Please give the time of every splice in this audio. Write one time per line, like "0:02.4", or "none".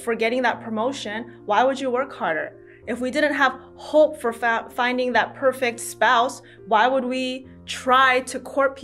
none